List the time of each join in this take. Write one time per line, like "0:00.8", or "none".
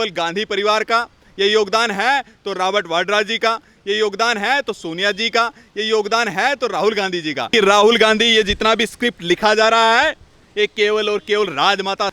0:07.5